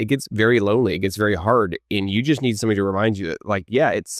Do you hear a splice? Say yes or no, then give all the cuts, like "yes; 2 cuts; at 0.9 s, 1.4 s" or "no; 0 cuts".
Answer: no; 0 cuts